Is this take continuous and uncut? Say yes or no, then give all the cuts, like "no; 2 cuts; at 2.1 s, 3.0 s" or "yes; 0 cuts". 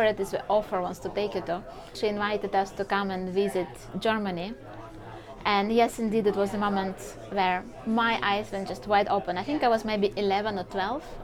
no; 1 cut; at 1.9 s